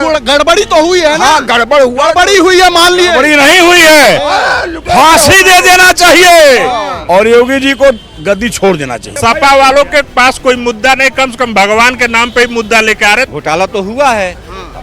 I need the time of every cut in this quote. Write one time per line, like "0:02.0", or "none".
0:09.0
0:13.3